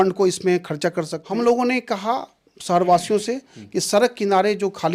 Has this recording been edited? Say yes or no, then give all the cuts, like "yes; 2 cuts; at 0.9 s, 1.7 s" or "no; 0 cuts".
yes; 1 cut; at 1.2 s